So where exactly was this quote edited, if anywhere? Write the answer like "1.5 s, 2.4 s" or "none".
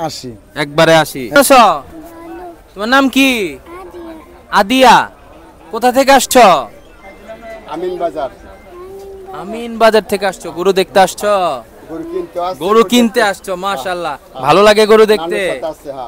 1.3 s